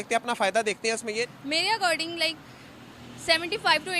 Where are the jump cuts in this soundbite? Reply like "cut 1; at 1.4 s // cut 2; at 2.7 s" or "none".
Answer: cut 1; at 1.2 s